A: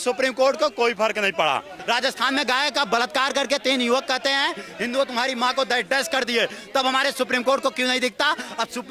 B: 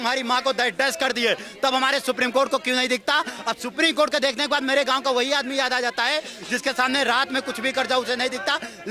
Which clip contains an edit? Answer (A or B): A